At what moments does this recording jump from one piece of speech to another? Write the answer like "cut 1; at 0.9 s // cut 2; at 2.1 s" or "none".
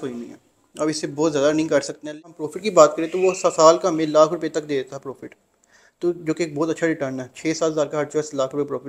cut 1; at 2.1 s